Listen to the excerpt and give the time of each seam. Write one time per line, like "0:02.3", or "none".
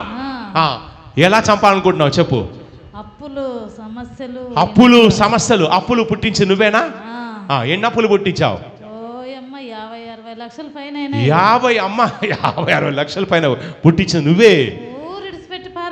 none